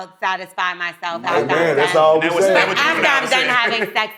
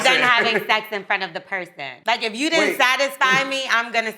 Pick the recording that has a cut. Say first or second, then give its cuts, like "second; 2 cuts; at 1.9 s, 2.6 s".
second; 1 cut; at 1.9 s